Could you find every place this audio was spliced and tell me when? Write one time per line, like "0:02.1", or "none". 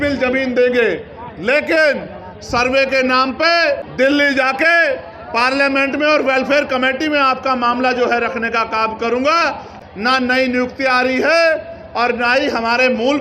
0:03.9
0:09.8